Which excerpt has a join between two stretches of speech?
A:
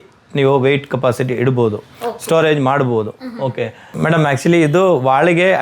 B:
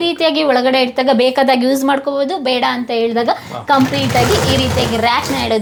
A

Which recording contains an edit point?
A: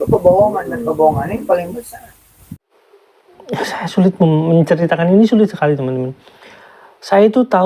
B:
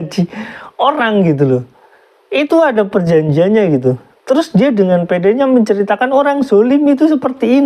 A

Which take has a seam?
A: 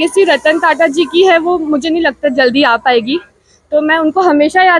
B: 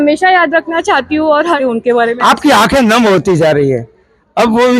B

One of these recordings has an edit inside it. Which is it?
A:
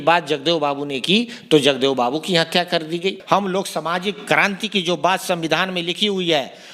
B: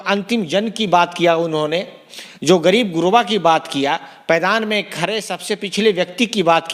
A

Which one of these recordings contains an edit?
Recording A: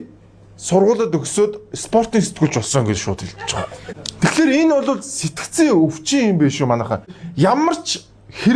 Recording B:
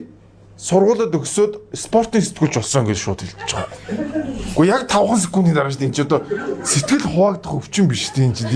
A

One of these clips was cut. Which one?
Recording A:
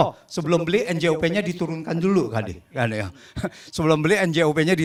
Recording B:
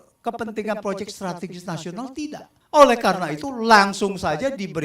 B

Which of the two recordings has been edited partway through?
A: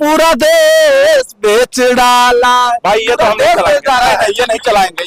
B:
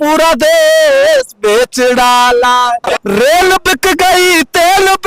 B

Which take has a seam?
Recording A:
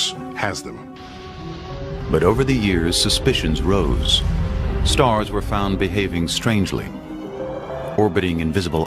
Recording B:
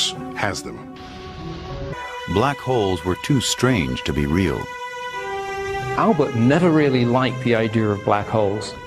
A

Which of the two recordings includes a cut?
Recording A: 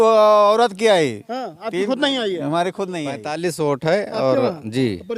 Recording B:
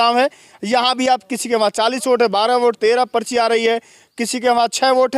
A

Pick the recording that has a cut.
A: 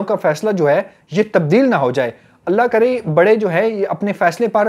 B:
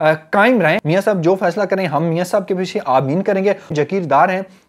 B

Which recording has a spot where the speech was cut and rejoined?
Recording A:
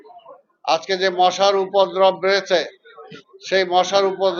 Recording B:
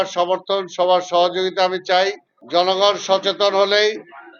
B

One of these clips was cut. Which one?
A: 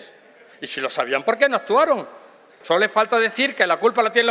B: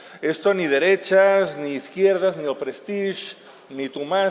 A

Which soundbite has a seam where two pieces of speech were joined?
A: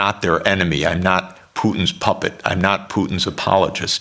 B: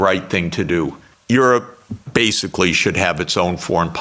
B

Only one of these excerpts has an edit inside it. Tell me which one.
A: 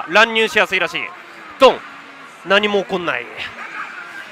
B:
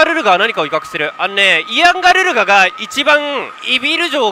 A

